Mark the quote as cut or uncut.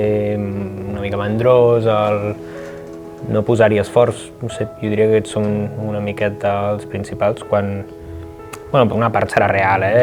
uncut